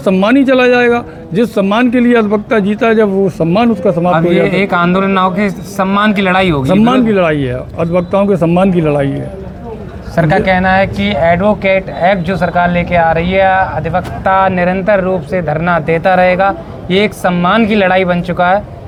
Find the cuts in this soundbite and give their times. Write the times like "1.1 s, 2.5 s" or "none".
none